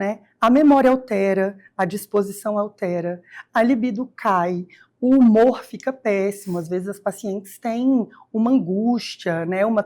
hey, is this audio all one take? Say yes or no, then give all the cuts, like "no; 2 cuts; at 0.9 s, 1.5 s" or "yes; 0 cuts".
yes; 0 cuts